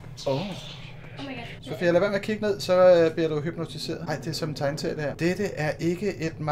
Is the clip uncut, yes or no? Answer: no